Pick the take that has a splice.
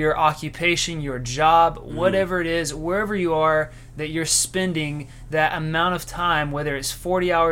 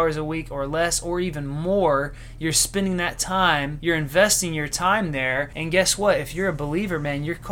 second; 2 cuts; at 3.7 s, 5.6 s

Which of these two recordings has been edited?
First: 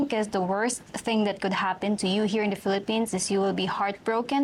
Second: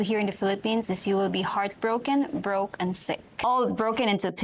second; 1 cut; at 3.4 s

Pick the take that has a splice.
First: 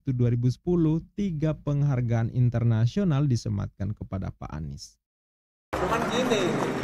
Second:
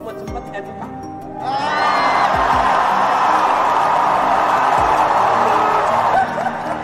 first; 1 cut; at 5.7 s

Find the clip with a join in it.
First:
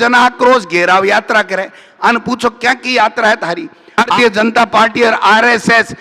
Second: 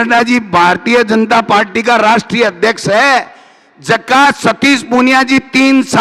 first; 1 cut; at 4.1 s

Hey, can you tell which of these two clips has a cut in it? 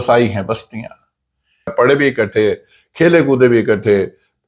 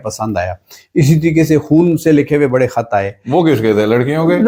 first; 1 cut; at 1.7 s

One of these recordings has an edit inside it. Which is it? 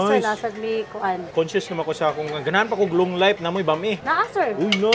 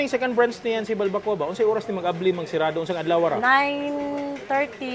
first; 2 cuts; at 1.2 s, 4.1 s

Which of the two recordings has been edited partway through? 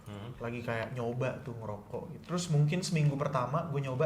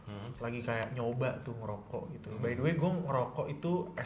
first; 1 cut; at 2.2 s

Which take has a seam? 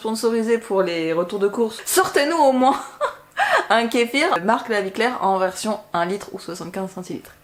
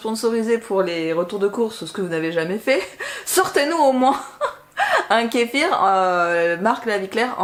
first; 2 cuts; at 1.8 s, 4.4 s

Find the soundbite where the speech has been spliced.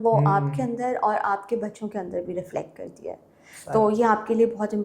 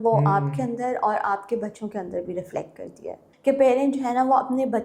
second; 1 cut; at 3.2 s

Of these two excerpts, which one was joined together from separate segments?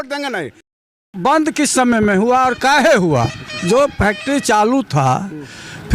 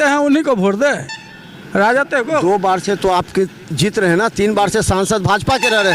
first; 1 cut; at 1.1 s

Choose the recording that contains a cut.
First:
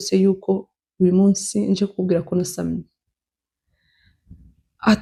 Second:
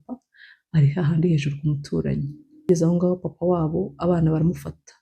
second; 1 cut; at 2.7 s

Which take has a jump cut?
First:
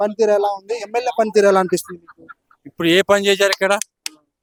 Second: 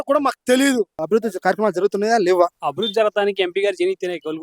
second; 2 cuts; at 1.0 s, 2.6 s

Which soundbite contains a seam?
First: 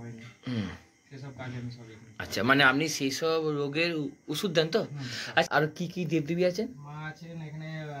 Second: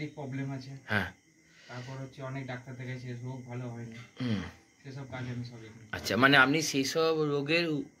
first; 1 cut; at 5.5 s

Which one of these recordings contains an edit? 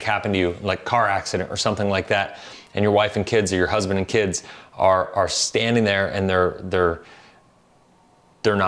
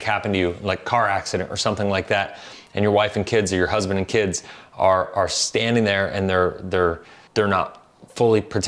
second; 1 cut; at 7.1 s

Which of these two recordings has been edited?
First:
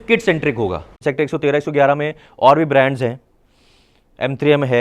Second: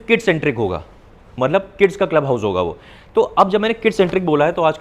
first; 1 cut; at 1.0 s

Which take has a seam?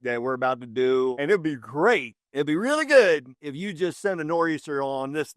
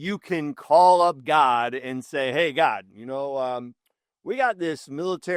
first; 1 cut; at 1.1 s

